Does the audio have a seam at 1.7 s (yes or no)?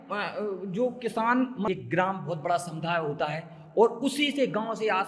yes